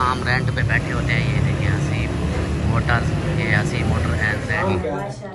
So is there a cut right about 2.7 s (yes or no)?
no